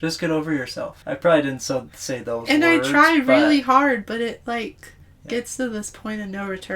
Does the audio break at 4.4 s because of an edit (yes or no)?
no